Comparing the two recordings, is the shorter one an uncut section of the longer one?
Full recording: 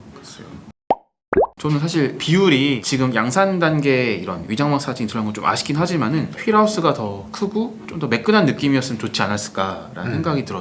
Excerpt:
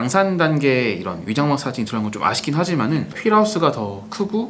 yes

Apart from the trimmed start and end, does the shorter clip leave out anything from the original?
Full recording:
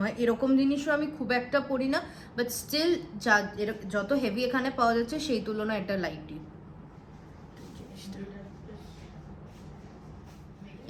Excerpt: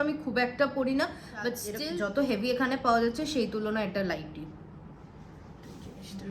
yes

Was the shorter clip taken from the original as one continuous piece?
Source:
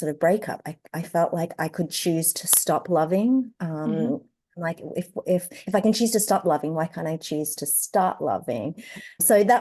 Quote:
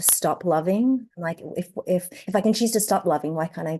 no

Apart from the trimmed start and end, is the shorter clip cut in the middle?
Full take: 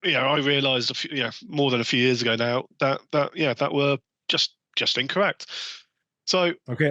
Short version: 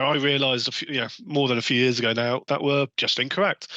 yes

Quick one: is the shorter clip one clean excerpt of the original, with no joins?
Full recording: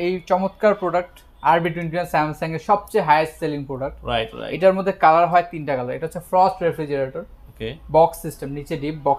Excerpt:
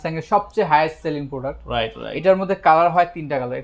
yes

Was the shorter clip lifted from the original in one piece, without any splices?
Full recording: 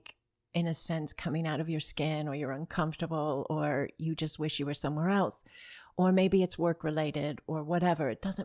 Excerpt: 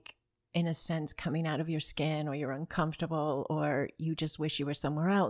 yes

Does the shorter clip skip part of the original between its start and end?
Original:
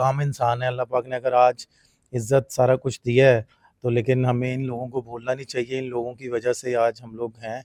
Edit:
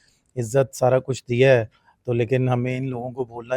no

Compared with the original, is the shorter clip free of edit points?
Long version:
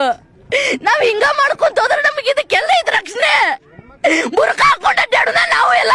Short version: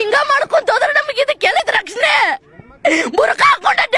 no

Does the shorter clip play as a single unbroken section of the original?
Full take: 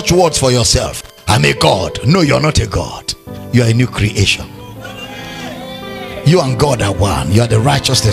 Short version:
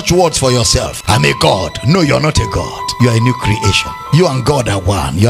no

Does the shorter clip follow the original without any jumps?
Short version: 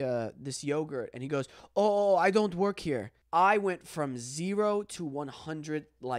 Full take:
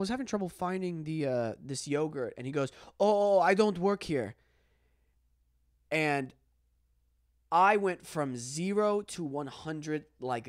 no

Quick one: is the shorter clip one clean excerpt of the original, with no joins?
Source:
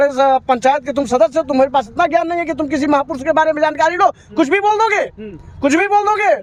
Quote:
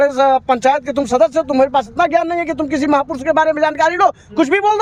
yes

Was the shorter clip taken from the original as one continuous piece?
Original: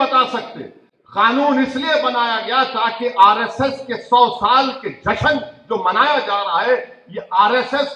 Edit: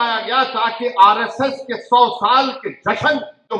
yes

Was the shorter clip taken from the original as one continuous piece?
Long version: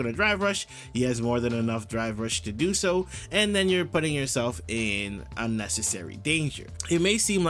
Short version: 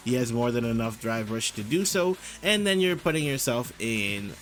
yes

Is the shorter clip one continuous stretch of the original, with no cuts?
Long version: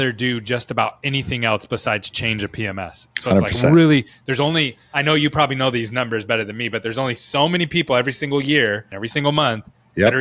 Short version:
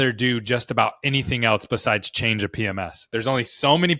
no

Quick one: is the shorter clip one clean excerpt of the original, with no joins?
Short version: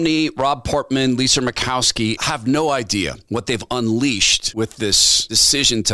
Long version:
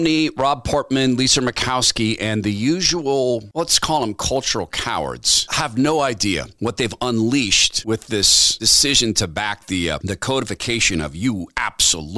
no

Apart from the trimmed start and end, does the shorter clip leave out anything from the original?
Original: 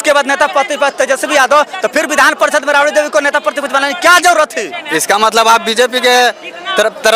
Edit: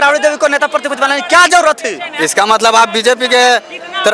no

